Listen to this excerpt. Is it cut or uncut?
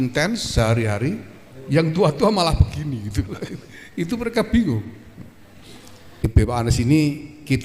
cut